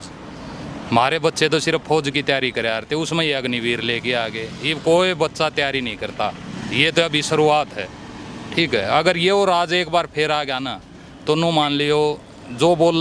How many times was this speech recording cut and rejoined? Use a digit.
1